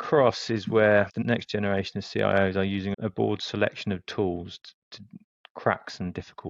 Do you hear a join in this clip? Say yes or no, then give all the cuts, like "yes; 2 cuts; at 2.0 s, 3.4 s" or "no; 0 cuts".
yes; 1 cut; at 1.2 s